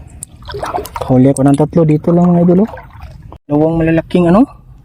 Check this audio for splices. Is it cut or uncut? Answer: cut